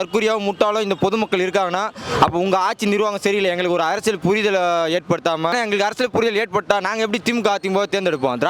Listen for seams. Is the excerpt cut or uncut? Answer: cut